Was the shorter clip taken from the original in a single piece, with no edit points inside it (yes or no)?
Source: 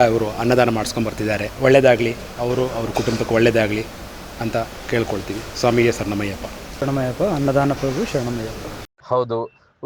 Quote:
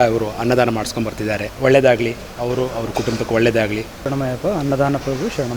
no